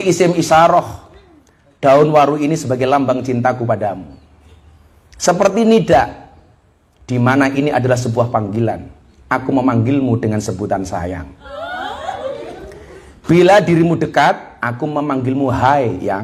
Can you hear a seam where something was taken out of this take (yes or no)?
no